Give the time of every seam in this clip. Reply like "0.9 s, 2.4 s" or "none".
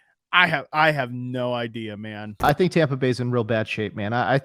2.2 s